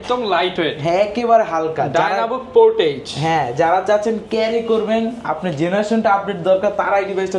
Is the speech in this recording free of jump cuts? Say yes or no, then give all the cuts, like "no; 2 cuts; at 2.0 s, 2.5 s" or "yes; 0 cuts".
yes; 0 cuts